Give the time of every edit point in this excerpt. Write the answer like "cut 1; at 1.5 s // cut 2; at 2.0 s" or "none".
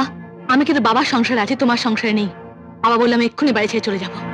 none